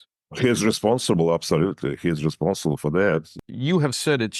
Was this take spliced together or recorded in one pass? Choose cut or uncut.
cut